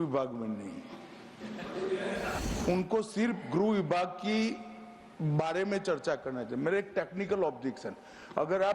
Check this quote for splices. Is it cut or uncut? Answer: cut